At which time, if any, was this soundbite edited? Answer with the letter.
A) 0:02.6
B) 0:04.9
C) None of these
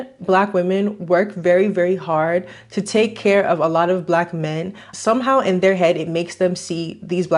B